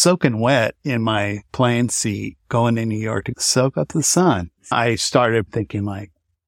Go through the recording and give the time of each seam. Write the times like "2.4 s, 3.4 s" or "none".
1.4 s, 4.7 s